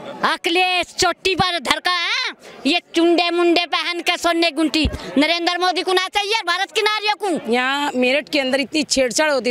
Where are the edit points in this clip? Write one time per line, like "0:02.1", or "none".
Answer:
0:07.4

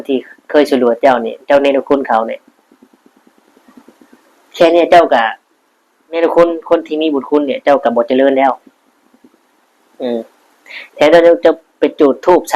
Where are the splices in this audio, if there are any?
0:06.0

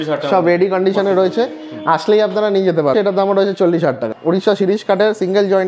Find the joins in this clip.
0:02.9
0:04.1

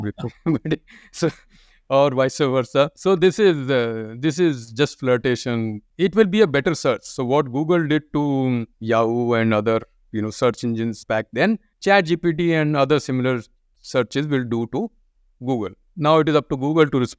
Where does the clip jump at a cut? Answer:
none

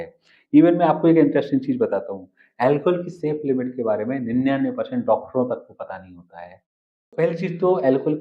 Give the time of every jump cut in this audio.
0:07.1

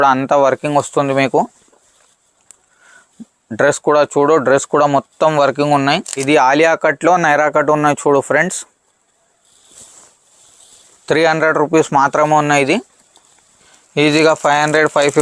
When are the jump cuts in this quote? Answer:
0:06.1

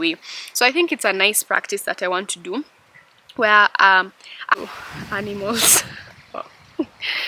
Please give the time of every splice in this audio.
0:04.6

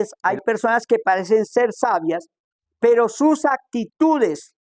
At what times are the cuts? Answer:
none

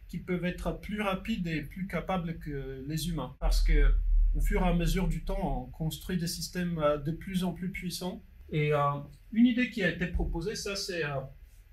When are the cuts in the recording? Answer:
0:03.5
0:08.3

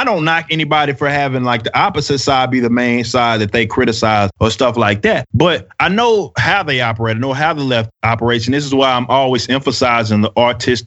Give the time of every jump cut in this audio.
none

